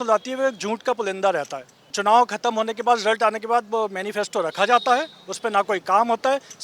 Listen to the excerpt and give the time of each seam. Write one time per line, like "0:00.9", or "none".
0:02.0